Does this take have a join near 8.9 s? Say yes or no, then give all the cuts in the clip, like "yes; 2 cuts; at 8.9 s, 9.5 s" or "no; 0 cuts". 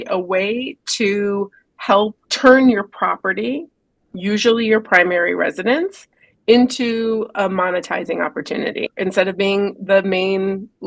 yes; 2 cuts; at 2.2 s, 8.9 s